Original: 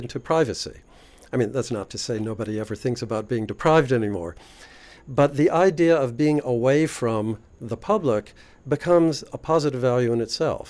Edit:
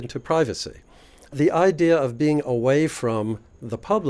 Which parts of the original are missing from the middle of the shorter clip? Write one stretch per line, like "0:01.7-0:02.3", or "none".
0:01.3-0:05.3